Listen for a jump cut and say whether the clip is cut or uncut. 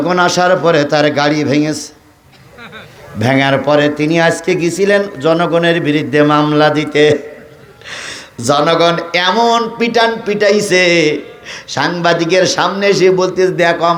uncut